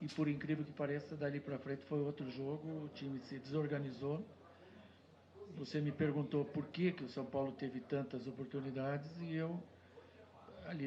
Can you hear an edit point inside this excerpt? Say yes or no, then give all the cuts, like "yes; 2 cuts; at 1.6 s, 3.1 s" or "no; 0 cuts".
yes; 1 cut; at 2.7 s